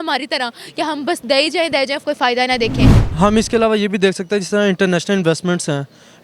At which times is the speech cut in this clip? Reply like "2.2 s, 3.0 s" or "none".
3.1 s